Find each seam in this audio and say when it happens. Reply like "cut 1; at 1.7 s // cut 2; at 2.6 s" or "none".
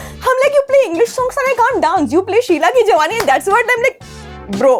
none